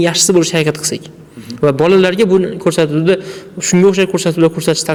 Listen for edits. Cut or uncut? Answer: uncut